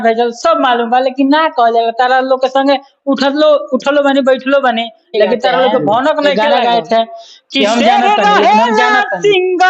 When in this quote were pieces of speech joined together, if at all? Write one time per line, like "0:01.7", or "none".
0:06.4